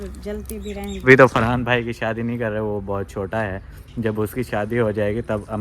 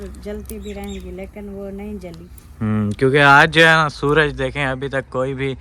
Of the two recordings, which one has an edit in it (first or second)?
first